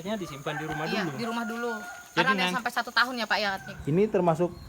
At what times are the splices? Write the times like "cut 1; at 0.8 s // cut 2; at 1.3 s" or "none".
cut 1; at 3.7 s